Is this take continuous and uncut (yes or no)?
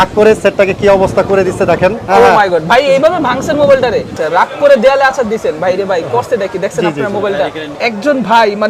no